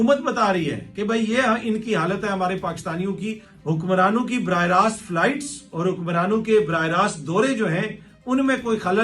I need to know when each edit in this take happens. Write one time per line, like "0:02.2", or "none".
0:03.5